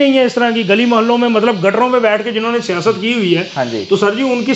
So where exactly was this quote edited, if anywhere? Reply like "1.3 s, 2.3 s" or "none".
none